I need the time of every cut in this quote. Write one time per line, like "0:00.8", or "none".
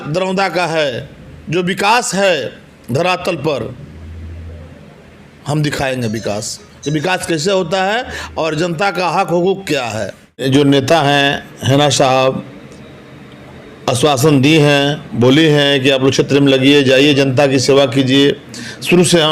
0:10.4